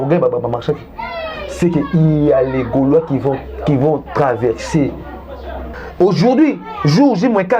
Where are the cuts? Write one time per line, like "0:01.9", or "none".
0:05.6